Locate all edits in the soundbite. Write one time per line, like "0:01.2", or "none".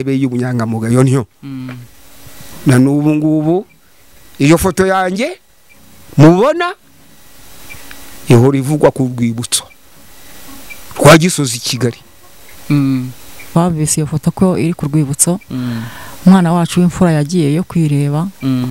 0:13.4